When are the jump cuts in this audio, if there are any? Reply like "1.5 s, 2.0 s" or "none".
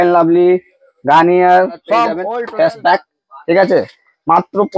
2.2 s